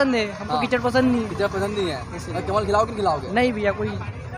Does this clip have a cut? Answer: no; 0 cuts

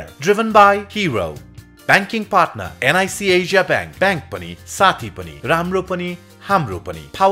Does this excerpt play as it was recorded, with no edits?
yes; 0 cuts

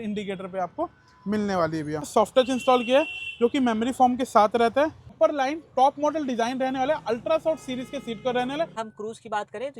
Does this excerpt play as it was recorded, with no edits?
no; 3 cuts; at 2.1 s, 5.1 s, 8.7 s

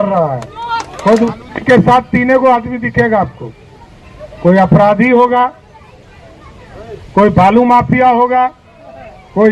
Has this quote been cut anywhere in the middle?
yes; 1 cut; at 1.3 s

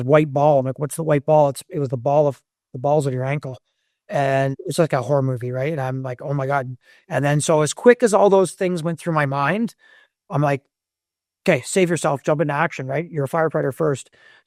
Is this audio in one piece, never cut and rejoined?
yes; 0 cuts

